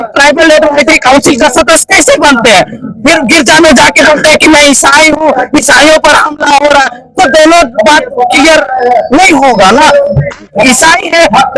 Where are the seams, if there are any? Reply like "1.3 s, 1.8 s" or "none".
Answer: none